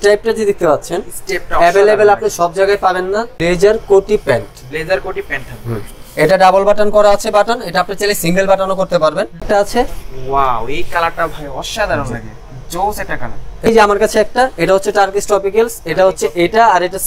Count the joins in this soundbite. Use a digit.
3